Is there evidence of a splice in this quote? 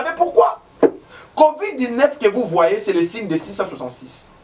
yes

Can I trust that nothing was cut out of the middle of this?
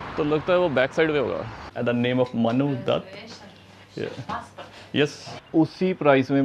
no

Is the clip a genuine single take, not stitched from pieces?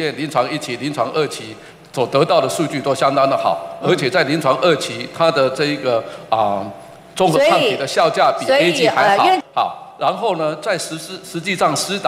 no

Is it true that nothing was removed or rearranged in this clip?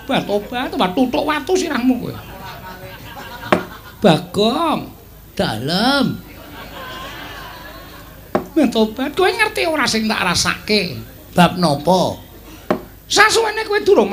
yes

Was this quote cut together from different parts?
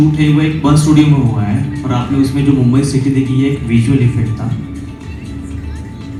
no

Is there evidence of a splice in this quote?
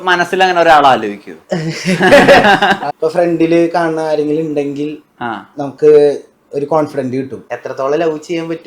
yes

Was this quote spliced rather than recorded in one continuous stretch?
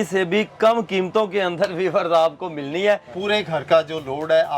yes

